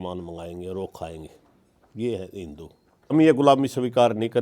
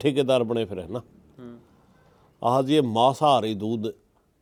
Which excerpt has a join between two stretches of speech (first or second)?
first